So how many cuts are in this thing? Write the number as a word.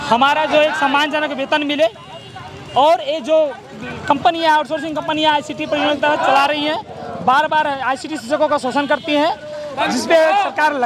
zero